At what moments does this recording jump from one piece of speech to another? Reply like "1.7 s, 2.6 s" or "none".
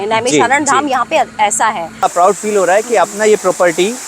2.0 s

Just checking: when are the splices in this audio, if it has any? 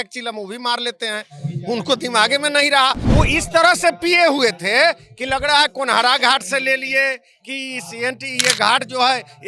3.0 s

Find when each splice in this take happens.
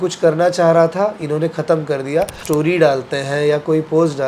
2.4 s

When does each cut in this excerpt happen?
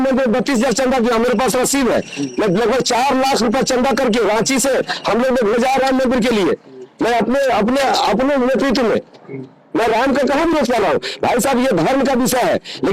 none

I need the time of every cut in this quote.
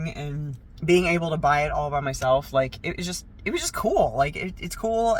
none

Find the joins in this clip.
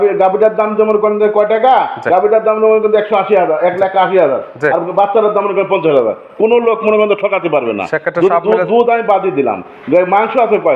none

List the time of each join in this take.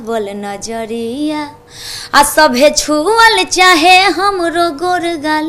none

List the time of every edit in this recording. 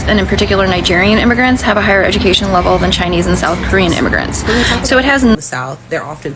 5.4 s

